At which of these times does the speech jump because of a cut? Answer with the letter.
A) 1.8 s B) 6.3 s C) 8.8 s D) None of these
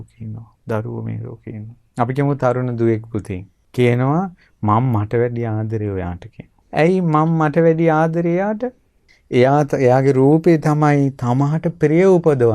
A